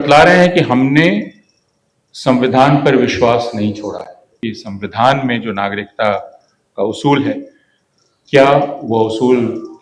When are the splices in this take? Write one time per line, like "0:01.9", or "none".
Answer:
0:04.3